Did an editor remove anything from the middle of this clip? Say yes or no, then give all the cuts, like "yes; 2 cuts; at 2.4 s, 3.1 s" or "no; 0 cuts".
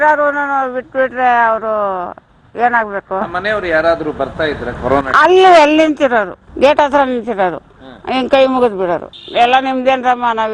yes; 1 cut; at 9.1 s